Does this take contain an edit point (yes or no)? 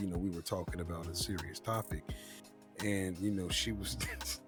no